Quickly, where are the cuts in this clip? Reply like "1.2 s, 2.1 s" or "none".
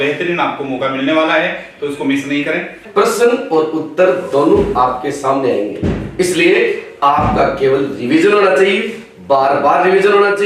2.8 s